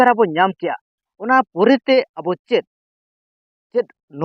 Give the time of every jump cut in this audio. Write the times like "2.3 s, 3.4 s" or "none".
none